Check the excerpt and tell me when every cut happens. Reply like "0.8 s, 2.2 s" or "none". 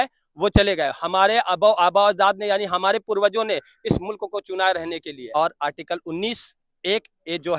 5.2 s